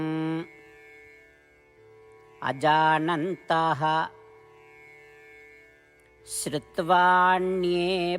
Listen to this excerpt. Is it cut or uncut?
cut